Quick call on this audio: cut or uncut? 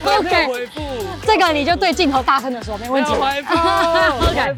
uncut